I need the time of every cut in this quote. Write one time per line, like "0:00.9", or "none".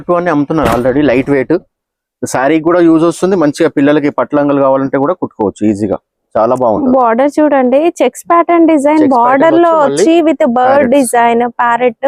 none